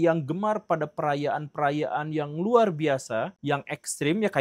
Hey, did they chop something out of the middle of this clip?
no; 0 cuts

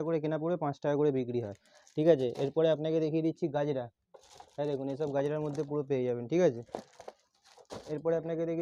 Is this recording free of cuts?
yes; 0 cuts

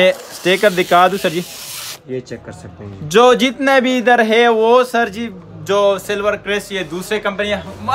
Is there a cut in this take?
no; 0 cuts

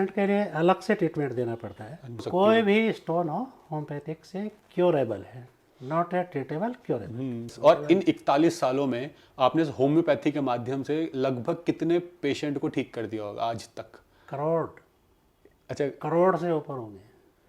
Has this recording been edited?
yes; 2 cuts; at 2.2 s, 7.5 s

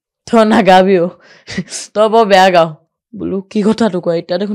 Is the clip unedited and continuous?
yes; 0 cuts

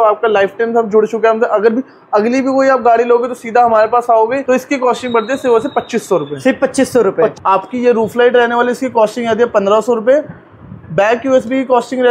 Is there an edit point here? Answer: yes; 2 cuts; at 4.4 s, 7.4 s

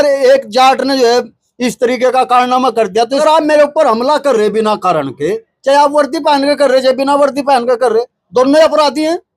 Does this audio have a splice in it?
yes; 1 cut; at 3.2 s

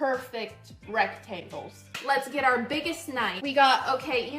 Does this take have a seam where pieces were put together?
yes; 2 cuts; at 1.8 s, 3.4 s

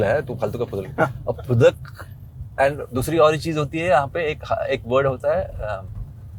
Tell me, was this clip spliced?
no; 0 cuts

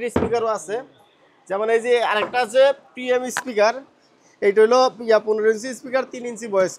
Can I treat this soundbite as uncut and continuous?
yes; 0 cuts

